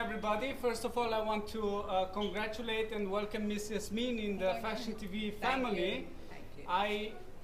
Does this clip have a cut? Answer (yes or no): no